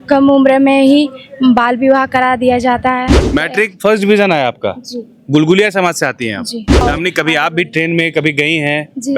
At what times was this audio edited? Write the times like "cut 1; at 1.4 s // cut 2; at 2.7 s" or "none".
cut 1; at 3.2 s // cut 2; at 6.8 s